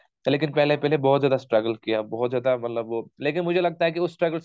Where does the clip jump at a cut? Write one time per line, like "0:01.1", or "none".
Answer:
none